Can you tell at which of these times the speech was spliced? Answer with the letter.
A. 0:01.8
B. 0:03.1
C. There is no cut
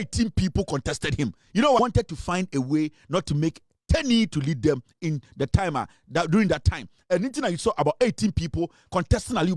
A